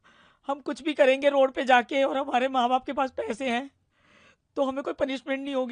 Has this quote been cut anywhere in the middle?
no; 0 cuts

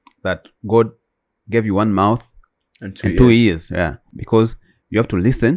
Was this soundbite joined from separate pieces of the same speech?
yes; 1 cut; at 4.1 s

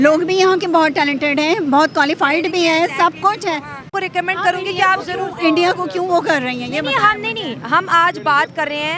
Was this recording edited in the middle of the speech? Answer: yes; 1 cut; at 3.9 s

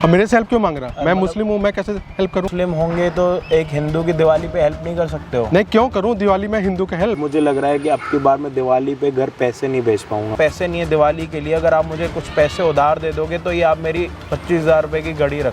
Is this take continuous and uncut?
no; 3 cuts; at 2.5 s, 7.2 s, 10.3 s

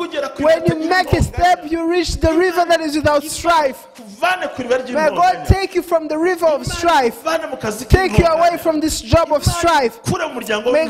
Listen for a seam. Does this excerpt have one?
no; 0 cuts

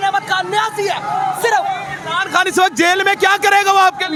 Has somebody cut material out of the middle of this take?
no; 0 cuts

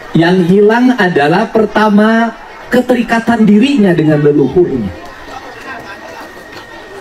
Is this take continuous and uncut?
yes; 0 cuts

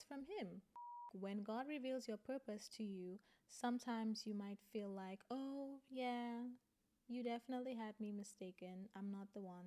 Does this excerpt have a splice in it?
yes; 1 cut; at 1.1 s

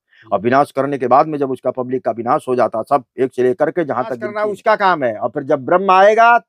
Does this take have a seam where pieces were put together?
yes; 1 cut; at 4.3 s

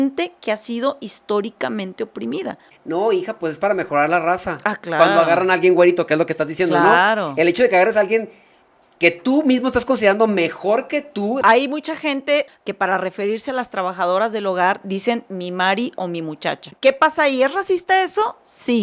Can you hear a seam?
yes; 4 cuts; at 2.7 s, 11.4 s, 12.5 s, 16.7 s

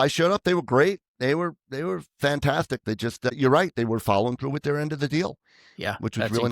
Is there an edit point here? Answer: yes; 1 cut; at 3.3 s

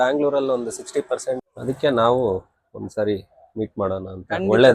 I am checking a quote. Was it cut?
yes; 1 cut; at 1.5 s

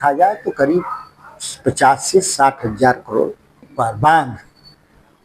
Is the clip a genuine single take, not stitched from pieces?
no; 1 cut; at 3.7 s

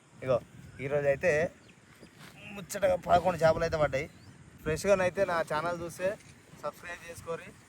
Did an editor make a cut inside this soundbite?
yes; 1 cut; at 4.5 s

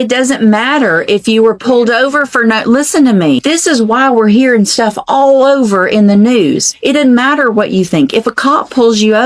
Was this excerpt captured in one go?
no; 2 cuts; at 3.4 s, 6.7 s

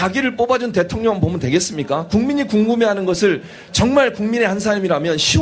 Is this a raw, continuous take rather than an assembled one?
no; 1 cut; at 3.7 s

